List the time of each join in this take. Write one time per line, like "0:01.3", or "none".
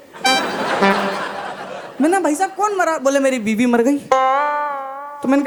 none